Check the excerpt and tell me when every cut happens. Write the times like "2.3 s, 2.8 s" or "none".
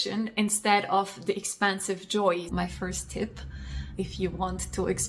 2.5 s